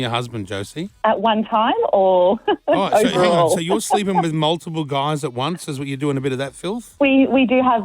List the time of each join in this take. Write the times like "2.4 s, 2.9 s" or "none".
1.0 s, 6.8 s